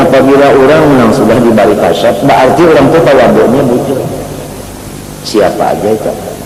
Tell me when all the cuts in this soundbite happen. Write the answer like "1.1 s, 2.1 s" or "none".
none